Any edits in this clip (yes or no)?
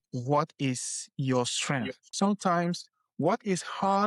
yes